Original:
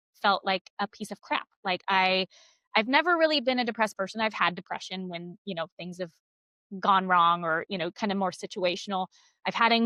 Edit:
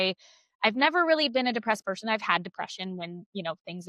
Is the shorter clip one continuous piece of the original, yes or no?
yes